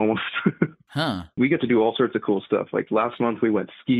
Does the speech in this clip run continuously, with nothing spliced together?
no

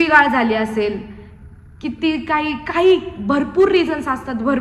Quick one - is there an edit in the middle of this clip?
no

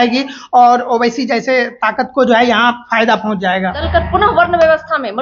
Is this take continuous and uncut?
no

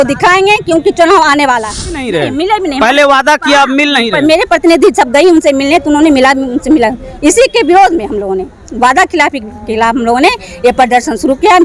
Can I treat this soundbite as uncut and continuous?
no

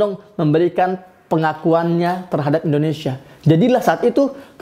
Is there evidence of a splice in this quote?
no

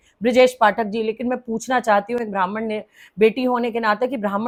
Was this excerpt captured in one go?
yes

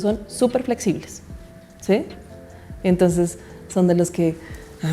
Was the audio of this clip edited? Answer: no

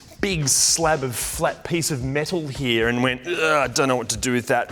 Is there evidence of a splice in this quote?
no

